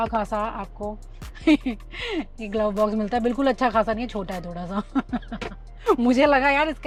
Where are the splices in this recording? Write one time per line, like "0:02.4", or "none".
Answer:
none